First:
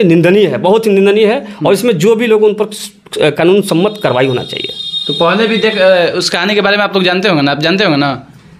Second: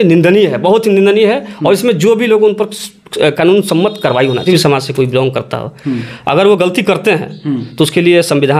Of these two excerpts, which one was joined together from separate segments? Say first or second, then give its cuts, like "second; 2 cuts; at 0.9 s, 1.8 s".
second; 1 cut; at 4.4 s